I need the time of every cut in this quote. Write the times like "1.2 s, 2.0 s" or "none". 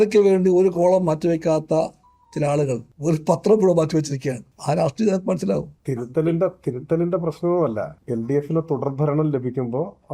2.9 s, 4.5 s, 5.8 s, 8.0 s